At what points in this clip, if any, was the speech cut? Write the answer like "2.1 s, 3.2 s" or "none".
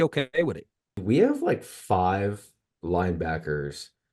1.0 s